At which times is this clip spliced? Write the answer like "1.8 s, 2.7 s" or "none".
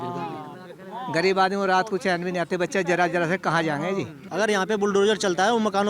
4.2 s